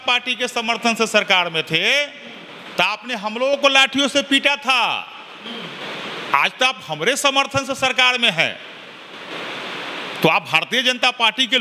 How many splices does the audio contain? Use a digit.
0